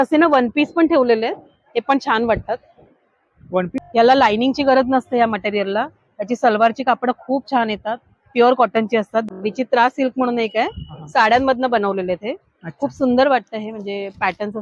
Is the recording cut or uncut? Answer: cut